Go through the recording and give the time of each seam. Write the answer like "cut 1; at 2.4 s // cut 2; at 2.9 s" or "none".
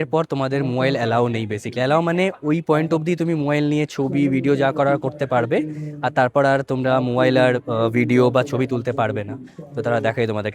none